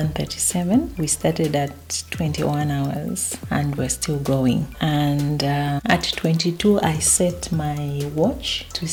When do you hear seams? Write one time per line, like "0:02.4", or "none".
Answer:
none